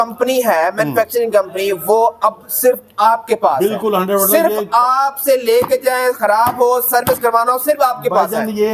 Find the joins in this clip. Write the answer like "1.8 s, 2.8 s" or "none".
none